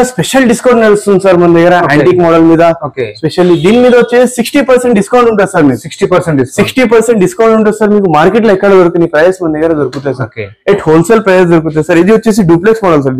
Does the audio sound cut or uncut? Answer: uncut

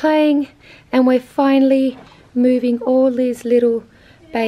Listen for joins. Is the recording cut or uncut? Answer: uncut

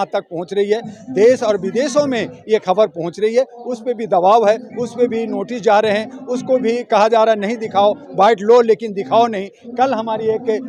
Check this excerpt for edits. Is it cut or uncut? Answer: uncut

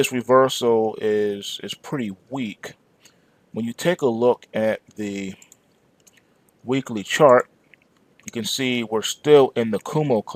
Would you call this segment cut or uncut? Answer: cut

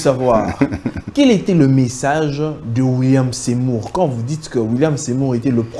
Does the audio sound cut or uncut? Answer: uncut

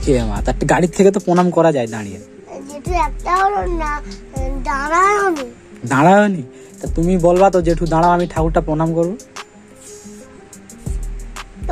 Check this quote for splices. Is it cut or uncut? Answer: uncut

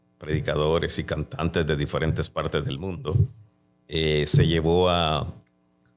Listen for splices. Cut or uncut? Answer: uncut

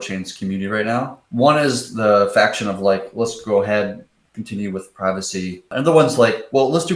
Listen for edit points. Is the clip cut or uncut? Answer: cut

